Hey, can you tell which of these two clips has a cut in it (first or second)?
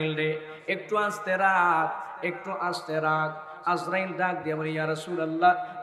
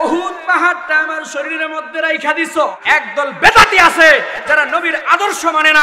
second